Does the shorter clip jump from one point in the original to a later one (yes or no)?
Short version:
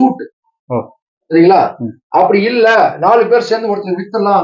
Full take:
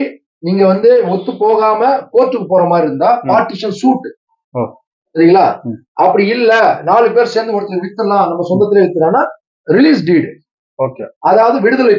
no